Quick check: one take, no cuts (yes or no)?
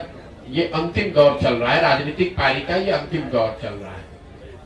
yes